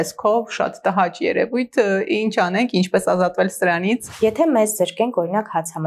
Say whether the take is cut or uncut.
cut